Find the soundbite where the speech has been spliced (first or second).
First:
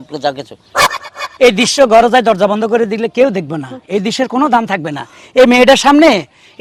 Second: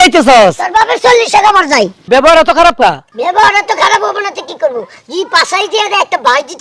second